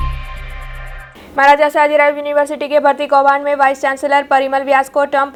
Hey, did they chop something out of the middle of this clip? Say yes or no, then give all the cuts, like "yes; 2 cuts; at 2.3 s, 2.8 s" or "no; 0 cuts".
no; 0 cuts